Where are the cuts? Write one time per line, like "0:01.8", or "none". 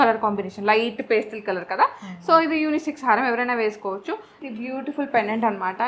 0:04.4

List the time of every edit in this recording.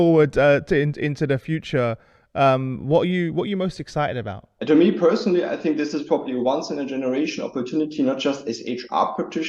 0:04.5

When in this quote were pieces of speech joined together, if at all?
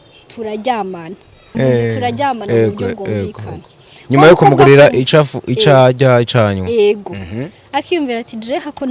0:01.5

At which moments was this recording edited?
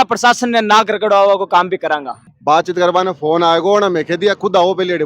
0:02.2

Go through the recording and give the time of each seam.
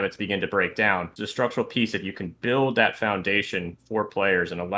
0:01.2

